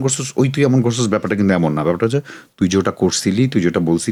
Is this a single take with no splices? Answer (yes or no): yes